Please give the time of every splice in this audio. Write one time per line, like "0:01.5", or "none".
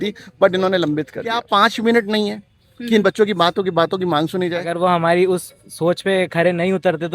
0:01.4
0:04.7